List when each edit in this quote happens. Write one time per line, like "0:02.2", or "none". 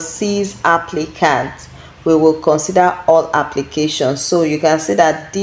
none